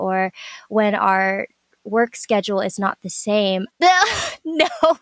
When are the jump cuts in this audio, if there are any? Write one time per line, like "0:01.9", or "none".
0:03.7